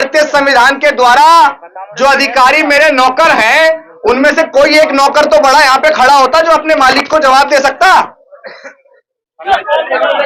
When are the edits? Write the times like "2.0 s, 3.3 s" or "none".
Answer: none